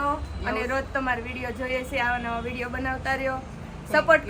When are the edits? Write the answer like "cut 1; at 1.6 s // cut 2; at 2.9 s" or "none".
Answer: none